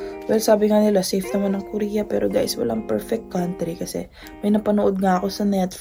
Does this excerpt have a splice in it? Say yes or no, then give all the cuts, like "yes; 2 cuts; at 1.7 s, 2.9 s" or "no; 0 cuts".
no; 0 cuts